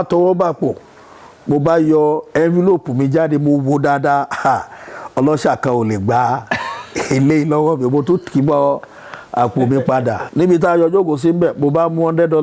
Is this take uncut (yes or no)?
no